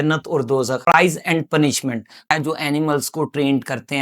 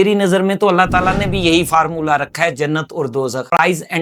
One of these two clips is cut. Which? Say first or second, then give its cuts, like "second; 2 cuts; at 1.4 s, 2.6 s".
first; 1 cut; at 2.3 s